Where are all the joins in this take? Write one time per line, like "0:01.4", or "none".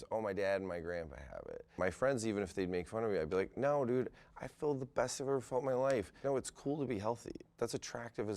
0:01.7
0:06.2
0:07.4